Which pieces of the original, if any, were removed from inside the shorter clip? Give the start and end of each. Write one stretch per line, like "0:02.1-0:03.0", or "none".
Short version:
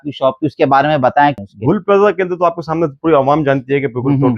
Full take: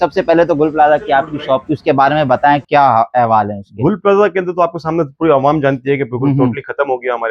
0:02.6-0:03.5